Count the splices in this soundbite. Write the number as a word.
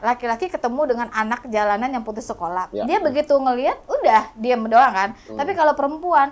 zero